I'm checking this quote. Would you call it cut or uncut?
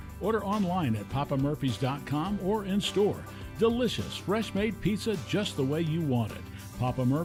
uncut